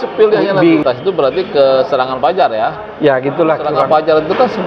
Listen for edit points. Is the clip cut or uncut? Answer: cut